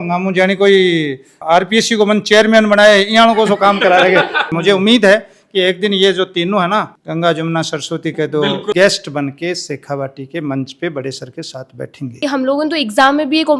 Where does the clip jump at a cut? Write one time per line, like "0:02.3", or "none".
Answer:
0:04.5
0:08.7
0:12.2

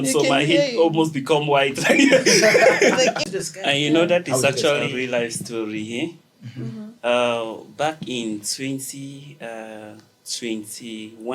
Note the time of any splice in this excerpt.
0:03.3
0:04.9

